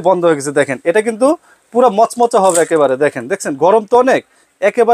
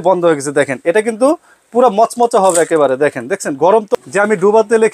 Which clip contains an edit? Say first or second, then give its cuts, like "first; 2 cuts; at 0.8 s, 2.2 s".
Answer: second; 1 cut; at 3.9 s